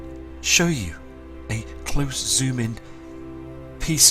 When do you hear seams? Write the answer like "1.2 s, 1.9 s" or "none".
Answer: none